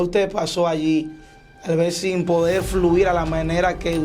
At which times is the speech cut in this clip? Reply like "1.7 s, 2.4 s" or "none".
none